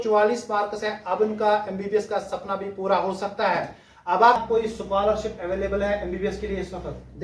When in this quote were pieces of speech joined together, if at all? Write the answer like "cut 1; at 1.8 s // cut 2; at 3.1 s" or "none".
cut 1; at 4.4 s